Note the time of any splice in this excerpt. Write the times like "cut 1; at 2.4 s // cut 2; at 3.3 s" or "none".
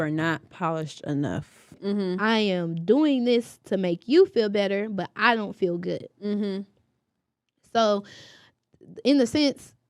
cut 1; at 1.8 s